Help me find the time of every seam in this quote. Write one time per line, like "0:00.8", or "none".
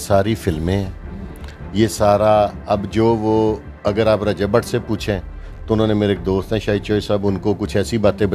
none